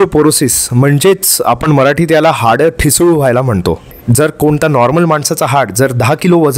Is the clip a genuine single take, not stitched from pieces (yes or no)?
no